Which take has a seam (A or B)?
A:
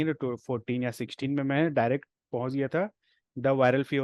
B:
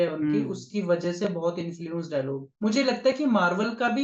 B